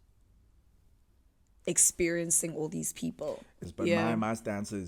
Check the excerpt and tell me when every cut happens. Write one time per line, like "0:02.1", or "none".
0:03.6